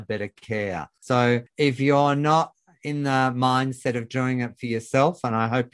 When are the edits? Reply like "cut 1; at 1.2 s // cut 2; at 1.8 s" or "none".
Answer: cut 1; at 0.9 s